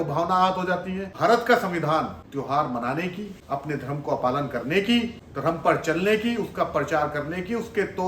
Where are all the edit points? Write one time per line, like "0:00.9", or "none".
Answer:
0:01.1
0:02.2
0:03.3
0:05.2